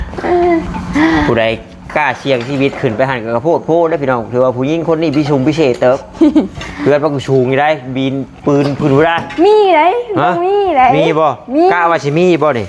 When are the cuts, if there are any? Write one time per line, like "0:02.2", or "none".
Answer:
none